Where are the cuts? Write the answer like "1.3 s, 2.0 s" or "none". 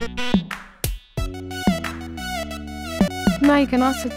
3.1 s